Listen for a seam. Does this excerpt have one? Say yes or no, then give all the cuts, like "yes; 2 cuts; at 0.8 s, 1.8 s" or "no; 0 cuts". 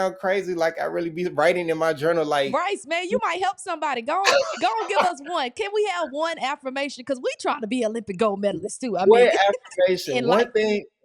no; 0 cuts